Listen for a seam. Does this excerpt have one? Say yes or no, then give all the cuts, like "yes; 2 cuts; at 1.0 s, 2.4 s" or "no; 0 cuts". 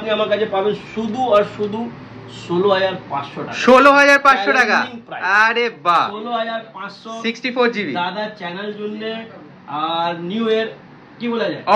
no; 0 cuts